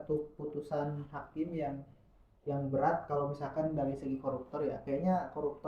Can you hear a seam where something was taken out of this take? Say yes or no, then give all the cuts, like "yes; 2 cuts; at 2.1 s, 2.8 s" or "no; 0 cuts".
no; 0 cuts